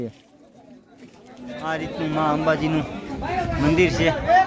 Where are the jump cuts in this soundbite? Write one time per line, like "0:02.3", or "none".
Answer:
0:01.6